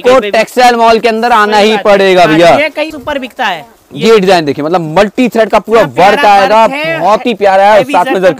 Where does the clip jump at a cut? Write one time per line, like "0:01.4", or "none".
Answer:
0:03.0